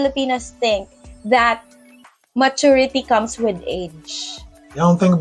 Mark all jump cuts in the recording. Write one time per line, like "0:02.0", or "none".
none

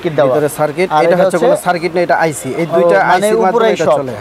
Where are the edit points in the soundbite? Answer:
none

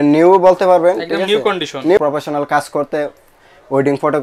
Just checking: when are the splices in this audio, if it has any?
0:02.0

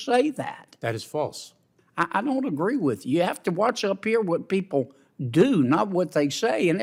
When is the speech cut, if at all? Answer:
none

